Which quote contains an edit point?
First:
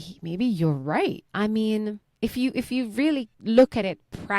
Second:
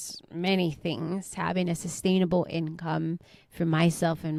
first; 3 cuts; at 1.2 s, 2.1 s, 3.3 s

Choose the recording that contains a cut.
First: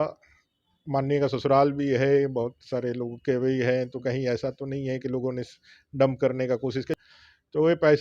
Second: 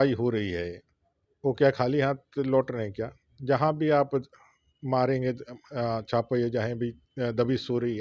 first; 1 cut; at 6.9 s

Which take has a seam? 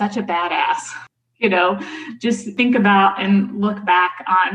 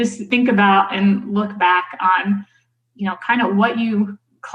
first; 1 cut; at 0.9 s

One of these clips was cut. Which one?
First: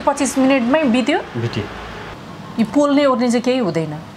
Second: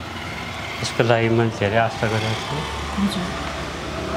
first; 1 cut; at 2.0 s

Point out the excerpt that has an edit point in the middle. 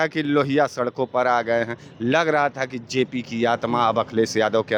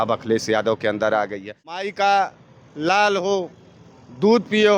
second; 1 cut; at 1.8 s

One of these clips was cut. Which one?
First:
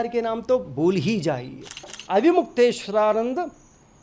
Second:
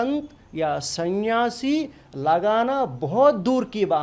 first; 1 cut; at 2.0 s

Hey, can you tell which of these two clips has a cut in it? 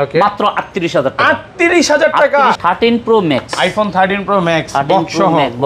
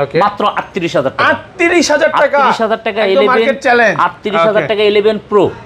first; 1 cut; at 2.6 s

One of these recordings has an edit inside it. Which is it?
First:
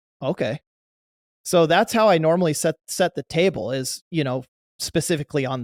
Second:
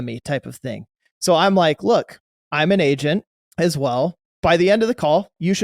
second; 2 cuts; at 3.4 s, 4.3 s

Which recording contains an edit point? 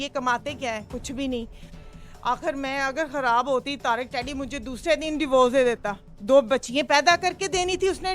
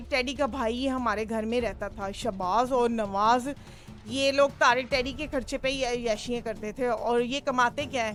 first; 1 cut; at 1.8 s

